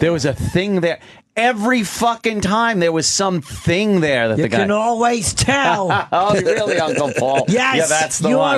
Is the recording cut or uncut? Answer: uncut